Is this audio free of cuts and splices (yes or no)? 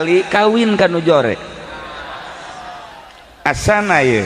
yes